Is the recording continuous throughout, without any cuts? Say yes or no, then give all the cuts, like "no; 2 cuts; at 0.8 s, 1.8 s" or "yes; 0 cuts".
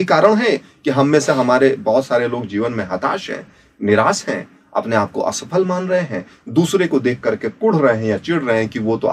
yes; 0 cuts